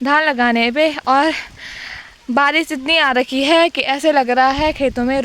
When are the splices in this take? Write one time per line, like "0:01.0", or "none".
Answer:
none